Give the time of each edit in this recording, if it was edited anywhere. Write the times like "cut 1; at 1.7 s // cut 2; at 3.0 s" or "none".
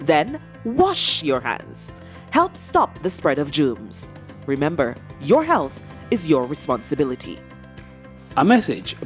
none